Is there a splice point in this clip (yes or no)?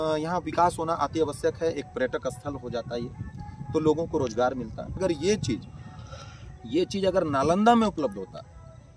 yes